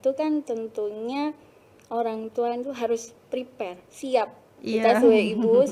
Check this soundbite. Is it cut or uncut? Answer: cut